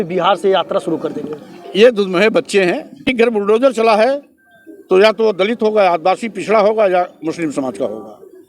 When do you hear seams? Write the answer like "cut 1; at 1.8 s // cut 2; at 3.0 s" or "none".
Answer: cut 1; at 3.0 s

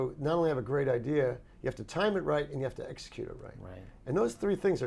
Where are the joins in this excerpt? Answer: none

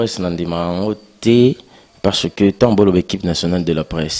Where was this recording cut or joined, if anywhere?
none

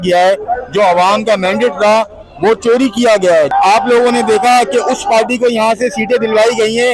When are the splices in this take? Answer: cut 1; at 3.5 s

